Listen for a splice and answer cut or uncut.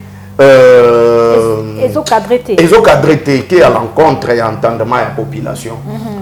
uncut